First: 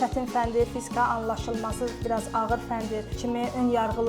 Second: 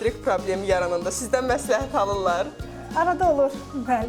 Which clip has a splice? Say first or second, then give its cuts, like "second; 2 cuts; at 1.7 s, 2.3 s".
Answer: first; 2 cuts; at 2.0 s, 3.1 s